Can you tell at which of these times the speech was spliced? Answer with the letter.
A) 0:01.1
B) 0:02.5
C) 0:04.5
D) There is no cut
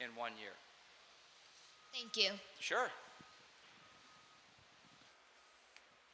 C